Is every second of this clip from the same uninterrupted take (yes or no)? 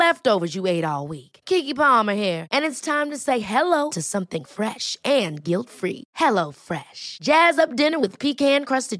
yes